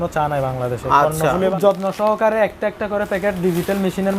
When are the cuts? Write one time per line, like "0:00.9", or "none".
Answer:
0:01.5